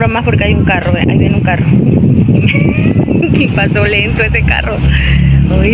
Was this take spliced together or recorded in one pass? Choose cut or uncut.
uncut